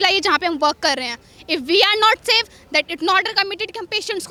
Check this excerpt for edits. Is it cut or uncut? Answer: uncut